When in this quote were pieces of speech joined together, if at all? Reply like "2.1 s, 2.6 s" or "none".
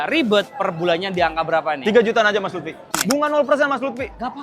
2.9 s